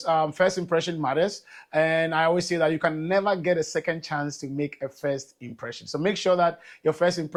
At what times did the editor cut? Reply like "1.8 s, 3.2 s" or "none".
none